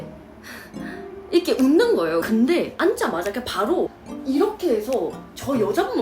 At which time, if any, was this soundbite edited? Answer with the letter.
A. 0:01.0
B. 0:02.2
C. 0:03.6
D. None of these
B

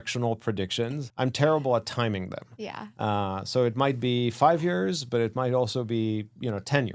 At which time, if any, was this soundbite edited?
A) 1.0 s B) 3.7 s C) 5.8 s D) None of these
A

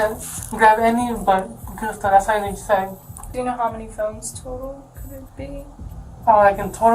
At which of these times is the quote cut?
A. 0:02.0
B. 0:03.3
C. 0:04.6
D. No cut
B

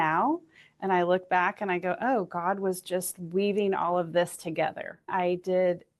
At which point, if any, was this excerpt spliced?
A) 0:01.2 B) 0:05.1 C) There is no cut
B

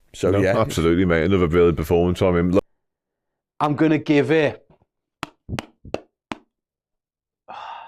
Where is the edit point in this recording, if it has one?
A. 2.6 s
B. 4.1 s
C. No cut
A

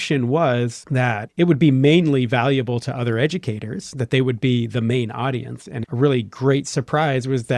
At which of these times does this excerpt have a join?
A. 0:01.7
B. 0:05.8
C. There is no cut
B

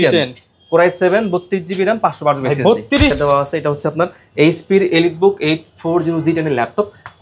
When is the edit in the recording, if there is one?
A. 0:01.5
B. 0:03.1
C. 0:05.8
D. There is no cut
B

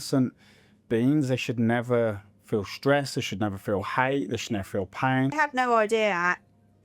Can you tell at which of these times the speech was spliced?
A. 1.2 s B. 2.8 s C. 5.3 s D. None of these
C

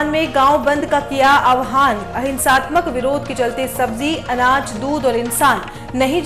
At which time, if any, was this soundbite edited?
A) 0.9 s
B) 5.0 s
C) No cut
C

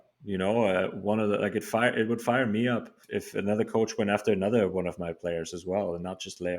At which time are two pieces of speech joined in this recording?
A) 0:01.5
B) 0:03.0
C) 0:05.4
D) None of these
B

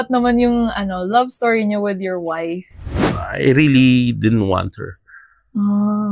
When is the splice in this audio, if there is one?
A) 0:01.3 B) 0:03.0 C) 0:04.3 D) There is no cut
B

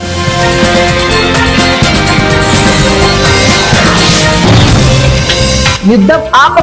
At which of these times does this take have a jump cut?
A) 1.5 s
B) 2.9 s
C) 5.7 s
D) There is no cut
D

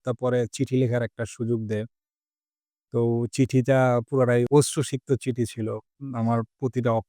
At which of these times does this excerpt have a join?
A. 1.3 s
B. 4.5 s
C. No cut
B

